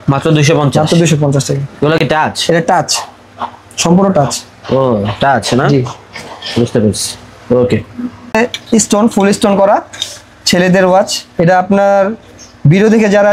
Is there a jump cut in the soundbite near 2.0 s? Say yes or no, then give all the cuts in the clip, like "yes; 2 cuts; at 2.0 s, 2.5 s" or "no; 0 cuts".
no; 0 cuts